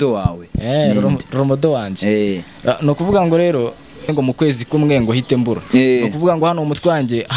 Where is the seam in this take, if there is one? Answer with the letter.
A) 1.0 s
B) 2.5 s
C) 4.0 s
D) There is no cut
C